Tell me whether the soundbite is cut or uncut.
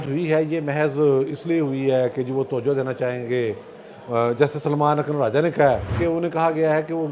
cut